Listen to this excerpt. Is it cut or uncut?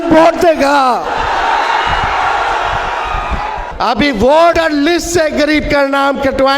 cut